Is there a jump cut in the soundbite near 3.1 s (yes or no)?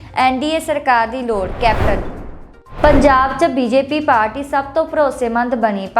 no